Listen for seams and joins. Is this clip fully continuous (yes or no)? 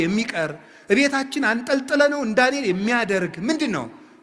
yes